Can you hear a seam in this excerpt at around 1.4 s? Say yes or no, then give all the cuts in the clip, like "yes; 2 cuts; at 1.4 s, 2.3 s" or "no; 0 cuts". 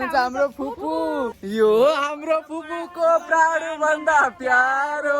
yes; 1 cut; at 1.4 s